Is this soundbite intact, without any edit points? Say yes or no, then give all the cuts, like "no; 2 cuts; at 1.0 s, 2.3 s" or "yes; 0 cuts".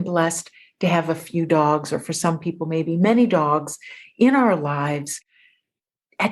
yes; 0 cuts